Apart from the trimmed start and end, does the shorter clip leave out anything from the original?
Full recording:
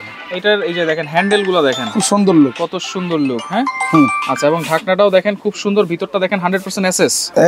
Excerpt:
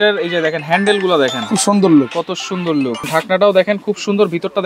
yes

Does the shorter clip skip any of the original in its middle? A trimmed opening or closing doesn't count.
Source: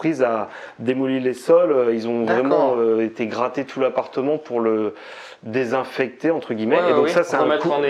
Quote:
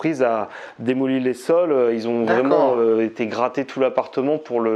no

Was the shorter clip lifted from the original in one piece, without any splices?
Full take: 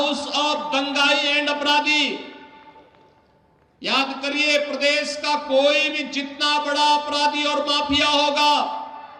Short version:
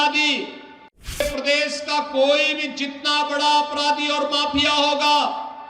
no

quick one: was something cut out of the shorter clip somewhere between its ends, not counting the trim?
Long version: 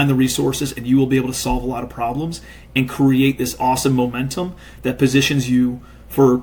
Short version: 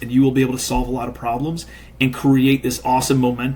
no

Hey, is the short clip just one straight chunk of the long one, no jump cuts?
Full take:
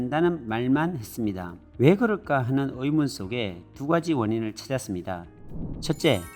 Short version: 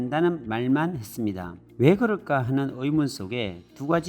yes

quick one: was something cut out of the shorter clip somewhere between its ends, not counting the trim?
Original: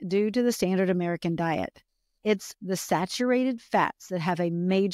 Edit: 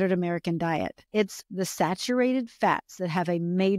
yes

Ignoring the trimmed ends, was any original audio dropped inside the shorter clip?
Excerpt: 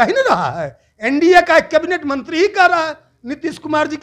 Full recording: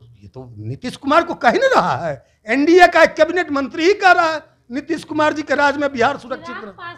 no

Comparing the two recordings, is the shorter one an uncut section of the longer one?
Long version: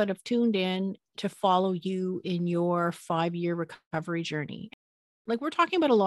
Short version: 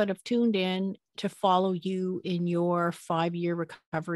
yes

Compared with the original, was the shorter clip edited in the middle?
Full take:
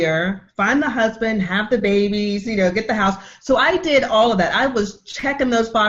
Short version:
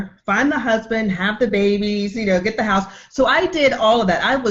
no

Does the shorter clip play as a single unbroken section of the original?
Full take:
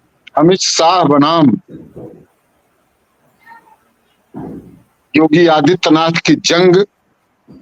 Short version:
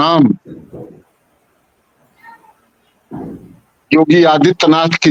yes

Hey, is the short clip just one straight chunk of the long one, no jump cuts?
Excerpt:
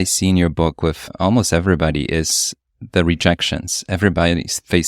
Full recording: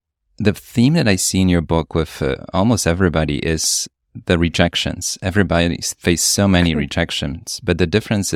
no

